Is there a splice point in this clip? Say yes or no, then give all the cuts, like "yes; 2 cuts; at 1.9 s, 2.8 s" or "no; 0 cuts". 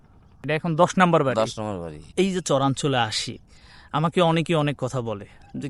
yes; 1 cut; at 2.1 s